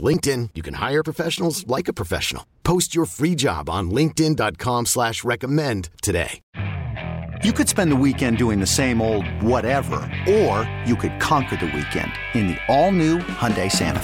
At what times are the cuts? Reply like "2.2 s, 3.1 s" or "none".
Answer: 6.4 s